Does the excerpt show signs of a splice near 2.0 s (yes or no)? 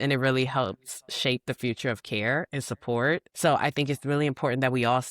no